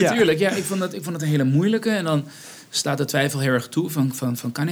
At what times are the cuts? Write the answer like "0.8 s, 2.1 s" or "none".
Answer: none